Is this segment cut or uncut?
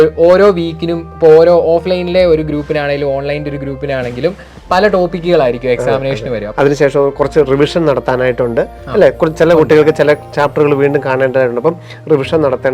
cut